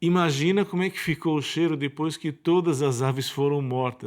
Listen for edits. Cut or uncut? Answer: uncut